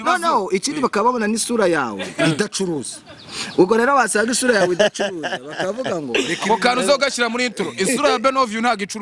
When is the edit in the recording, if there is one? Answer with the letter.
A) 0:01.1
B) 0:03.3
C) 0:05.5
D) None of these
D